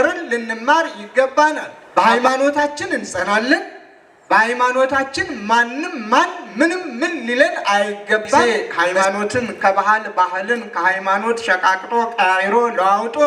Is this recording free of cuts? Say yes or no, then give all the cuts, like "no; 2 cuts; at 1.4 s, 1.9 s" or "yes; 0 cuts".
no; 2 cuts; at 1.7 s, 8.4 s